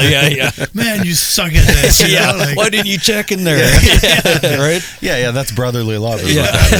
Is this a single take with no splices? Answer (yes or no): yes